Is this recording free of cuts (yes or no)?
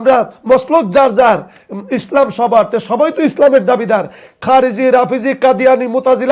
yes